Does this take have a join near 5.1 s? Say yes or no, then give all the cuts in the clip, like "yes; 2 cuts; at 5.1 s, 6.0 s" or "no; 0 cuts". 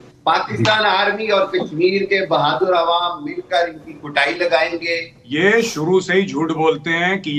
yes; 1 cut; at 5.1 s